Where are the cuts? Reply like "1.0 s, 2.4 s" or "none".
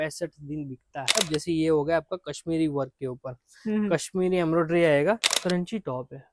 1.2 s, 5.3 s